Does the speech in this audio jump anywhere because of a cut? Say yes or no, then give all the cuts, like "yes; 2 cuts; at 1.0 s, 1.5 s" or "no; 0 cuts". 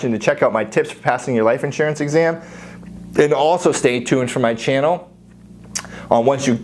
no; 0 cuts